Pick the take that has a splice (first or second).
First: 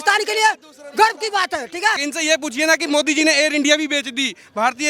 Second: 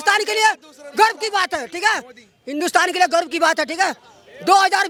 first